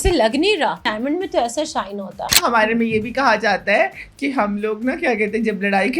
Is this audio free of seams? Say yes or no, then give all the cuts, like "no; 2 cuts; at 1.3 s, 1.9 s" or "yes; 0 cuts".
no; 2 cuts; at 0.9 s, 2.4 s